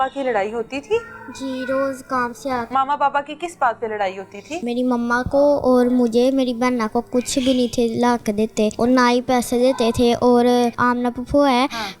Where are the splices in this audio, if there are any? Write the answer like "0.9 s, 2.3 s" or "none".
2.7 s, 4.6 s, 8.7 s, 10.8 s